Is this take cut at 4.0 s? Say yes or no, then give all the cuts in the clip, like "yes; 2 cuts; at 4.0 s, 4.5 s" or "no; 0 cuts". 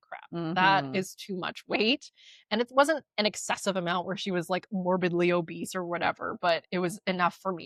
no; 0 cuts